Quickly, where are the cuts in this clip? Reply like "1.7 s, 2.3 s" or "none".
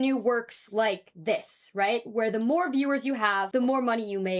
none